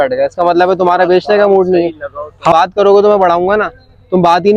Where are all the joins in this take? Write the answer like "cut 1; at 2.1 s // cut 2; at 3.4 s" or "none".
cut 1; at 2.5 s